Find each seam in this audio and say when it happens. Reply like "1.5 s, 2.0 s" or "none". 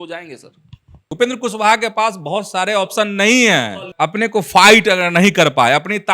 1.1 s, 3.9 s

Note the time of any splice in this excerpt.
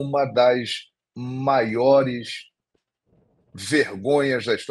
none

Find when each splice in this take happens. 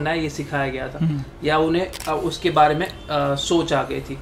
2.0 s

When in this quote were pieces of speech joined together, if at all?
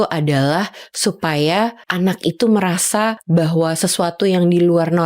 1.8 s, 3.2 s

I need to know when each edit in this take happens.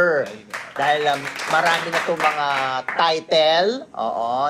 none

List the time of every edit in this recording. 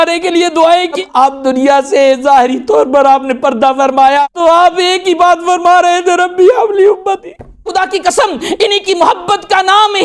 1.0 s, 4.2 s, 7.7 s

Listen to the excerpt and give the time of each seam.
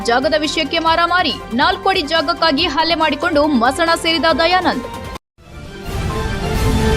5.1 s

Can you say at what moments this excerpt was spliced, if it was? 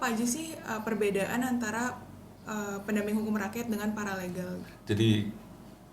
4.7 s

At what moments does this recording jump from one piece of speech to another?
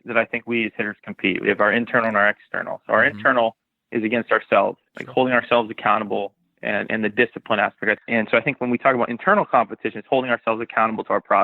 7.9 s

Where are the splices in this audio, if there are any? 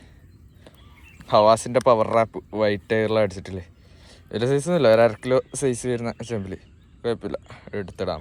none

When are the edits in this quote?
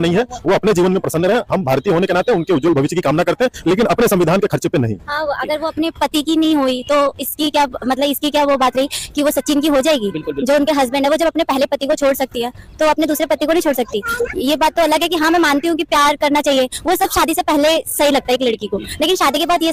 none

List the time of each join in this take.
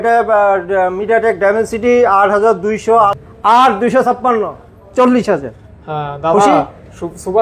3.1 s

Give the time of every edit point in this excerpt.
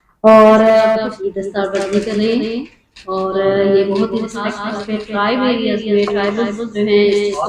1.0 s, 4.6 s

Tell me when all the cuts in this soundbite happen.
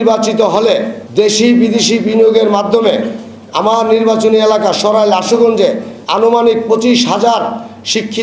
1.0 s, 5.9 s

